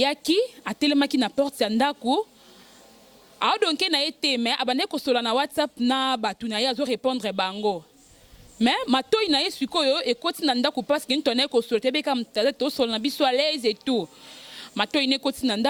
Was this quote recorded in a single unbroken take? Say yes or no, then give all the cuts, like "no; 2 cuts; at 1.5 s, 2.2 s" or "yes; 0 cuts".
yes; 0 cuts